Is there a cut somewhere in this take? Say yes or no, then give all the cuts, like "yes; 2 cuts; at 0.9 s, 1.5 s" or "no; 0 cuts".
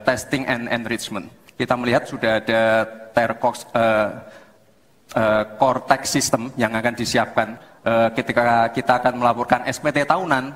yes; 1 cut; at 7.6 s